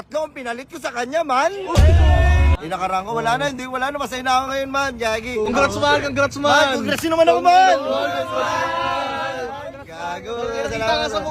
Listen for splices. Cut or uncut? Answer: cut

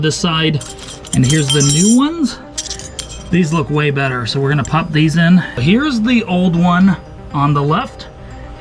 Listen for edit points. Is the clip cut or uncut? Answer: cut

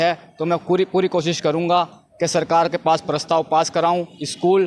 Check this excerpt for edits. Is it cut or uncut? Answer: uncut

